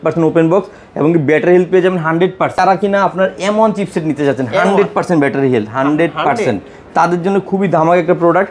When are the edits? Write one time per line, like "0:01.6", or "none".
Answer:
0:02.6